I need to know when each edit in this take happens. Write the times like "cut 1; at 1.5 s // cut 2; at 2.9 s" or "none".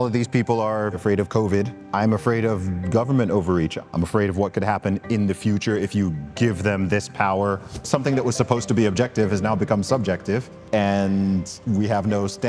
cut 1; at 1.0 s // cut 2; at 1.8 s // cut 3; at 3.7 s // cut 4; at 7.8 s // cut 5; at 10.5 s

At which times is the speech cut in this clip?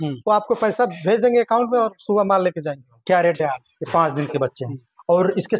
cut 1; at 3.4 s

